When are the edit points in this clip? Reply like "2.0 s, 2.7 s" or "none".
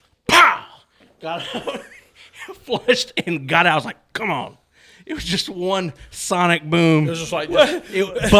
none

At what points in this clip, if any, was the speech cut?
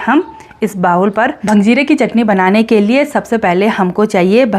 1.4 s

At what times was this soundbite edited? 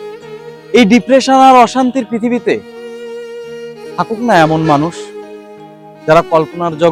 none

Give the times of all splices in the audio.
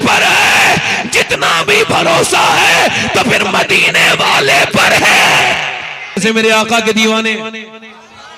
6.2 s

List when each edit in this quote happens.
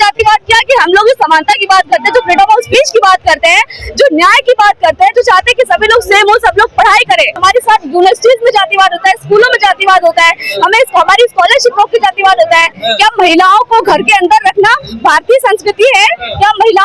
7.4 s, 12.8 s

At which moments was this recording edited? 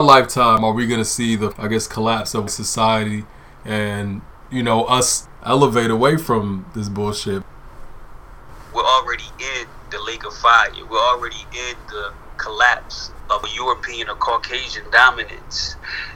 1.6 s, 2.5 s, 5.2 s

